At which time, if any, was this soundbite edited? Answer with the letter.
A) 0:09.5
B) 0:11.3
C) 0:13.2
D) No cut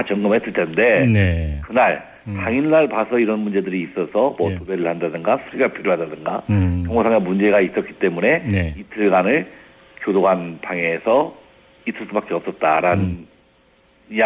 B